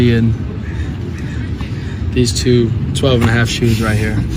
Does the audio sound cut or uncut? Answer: uncut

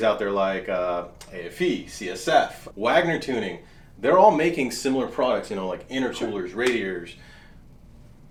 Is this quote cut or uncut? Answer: uncut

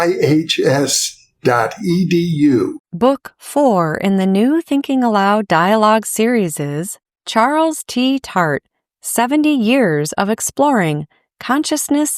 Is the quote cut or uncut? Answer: cut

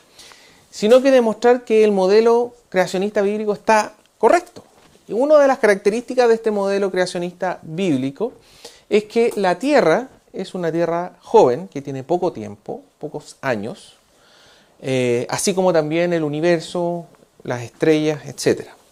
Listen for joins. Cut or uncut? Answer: uncut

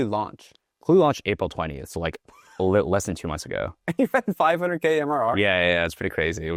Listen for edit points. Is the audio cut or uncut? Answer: uncut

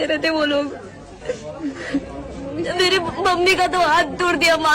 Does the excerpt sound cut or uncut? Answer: uncut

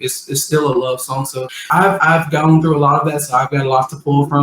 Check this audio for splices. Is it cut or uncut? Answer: cut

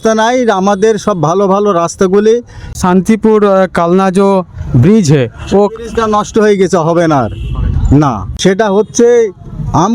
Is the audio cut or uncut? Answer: cut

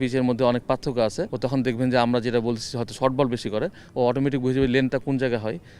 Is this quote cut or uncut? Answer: cut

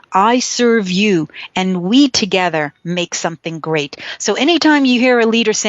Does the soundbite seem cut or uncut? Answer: uncut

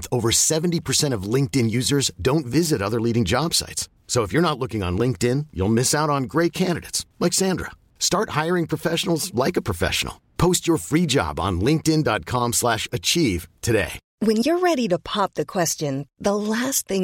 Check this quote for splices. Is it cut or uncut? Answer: cut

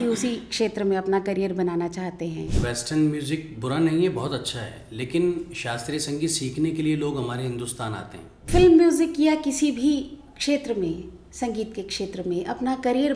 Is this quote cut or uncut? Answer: cut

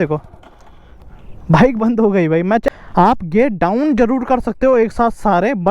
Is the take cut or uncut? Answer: cut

